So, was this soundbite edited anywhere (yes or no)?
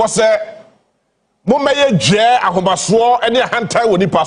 no